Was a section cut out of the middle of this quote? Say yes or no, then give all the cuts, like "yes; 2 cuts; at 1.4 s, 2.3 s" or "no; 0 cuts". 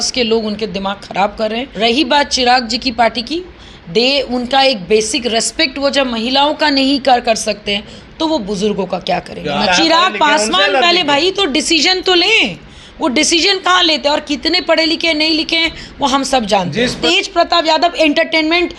yes; 3 cuts; at 1.7 s, 9.7 s, 17.0 s